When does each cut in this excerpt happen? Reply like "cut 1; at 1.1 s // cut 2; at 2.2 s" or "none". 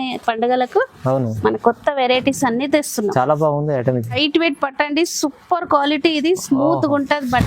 cut 1; at 4.2 s